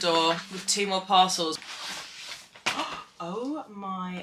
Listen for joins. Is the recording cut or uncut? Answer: cut